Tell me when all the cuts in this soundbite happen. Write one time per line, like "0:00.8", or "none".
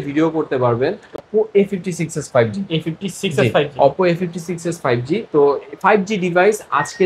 0:01.2